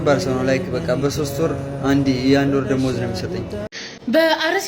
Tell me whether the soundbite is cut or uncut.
cut